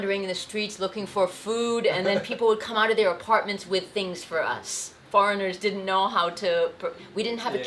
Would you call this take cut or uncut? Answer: cut